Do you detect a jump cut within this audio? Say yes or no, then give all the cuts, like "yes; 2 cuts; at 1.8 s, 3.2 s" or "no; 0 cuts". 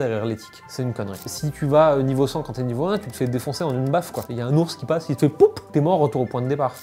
yes; 1 cut; at 1.2 s